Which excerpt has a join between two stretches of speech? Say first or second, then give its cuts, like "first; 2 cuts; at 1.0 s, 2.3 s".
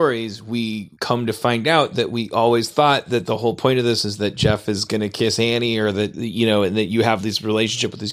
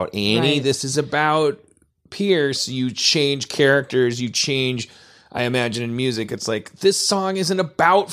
first; 1 cut; at 0.9 s